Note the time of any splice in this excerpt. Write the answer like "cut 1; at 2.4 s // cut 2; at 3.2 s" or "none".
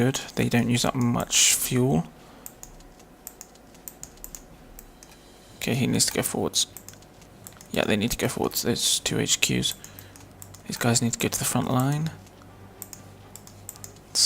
cut 1; at 9.0 s

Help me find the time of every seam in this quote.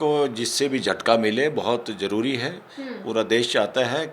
none

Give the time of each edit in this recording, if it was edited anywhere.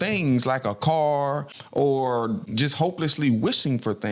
cut 1; at 1.5 s // cut 2; at 2.5 s

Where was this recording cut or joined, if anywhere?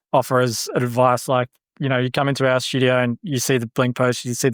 none

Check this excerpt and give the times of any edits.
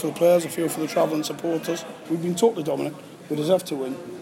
cut 1; at 1.9 s

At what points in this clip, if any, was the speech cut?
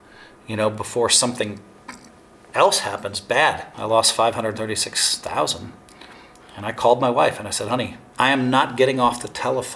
cut 1; at 3.7 s // cut 2; at 8.0 s

